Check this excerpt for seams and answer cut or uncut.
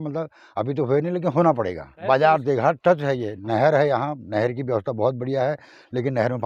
uncut